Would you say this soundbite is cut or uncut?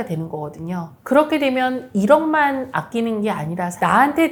uncut